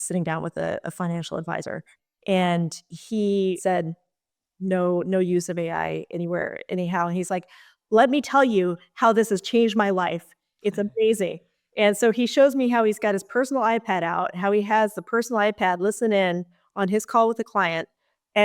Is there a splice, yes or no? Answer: yes